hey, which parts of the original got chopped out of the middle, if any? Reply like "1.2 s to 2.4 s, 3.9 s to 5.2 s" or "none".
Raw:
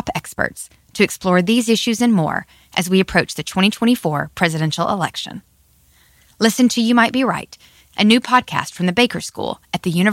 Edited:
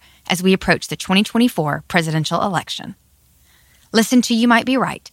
none